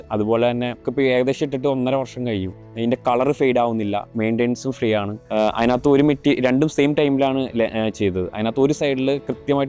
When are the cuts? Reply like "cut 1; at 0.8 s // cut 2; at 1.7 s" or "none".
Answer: cut 1; at 0.8 s // cut 2; at 5.2 s